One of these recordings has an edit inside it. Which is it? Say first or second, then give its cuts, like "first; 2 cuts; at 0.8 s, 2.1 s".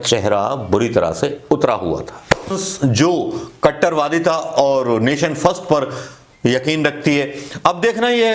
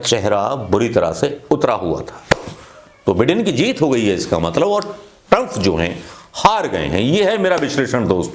first; 1 cut; at 2.6 s